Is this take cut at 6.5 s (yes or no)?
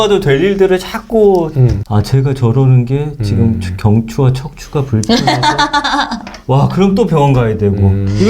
no